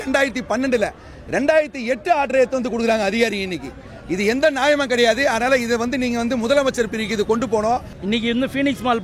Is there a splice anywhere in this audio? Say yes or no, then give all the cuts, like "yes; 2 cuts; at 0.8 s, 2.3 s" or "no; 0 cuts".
yes; 1 cut; at 7.9 s